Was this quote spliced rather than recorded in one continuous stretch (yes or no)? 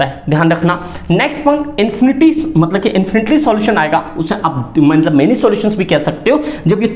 no